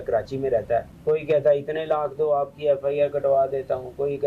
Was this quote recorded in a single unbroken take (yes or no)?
no